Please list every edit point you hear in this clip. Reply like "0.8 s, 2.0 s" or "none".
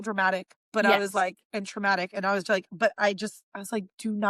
none